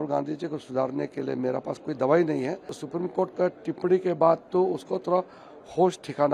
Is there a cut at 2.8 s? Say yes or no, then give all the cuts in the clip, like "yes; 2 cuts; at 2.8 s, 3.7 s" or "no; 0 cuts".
yes; 1 cut; at 2.8 s